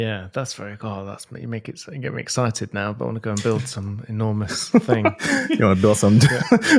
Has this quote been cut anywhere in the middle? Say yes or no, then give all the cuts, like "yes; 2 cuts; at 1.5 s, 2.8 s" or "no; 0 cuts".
no; 0 cuts